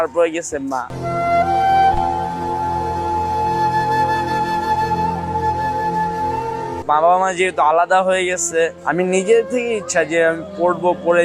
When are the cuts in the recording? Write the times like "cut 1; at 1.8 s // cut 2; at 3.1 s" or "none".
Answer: cut 1; at 6.8 s // cut 2; at 8.8 s